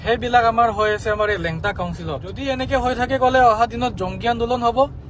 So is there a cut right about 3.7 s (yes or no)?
no